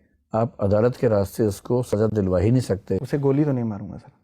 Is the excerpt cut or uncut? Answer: cut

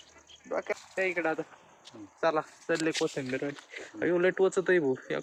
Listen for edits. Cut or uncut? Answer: uncut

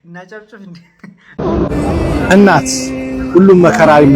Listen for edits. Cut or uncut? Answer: cut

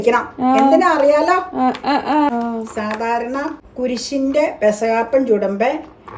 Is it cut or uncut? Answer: cut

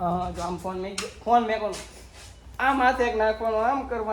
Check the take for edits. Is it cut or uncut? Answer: uncut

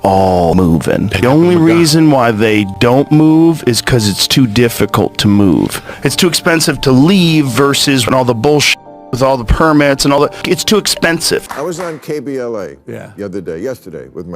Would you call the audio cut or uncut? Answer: cut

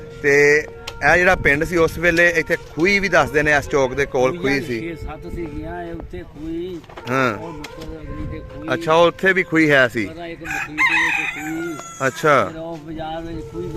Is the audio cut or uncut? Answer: uncut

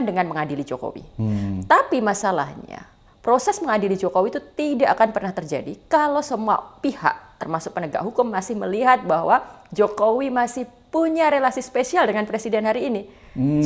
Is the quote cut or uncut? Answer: uncut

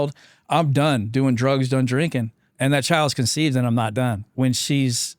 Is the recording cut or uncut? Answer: cut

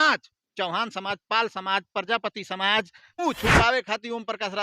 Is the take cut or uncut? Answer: cut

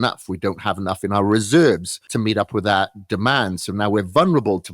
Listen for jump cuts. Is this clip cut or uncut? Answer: cut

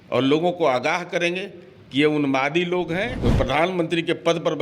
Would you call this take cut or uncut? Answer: cut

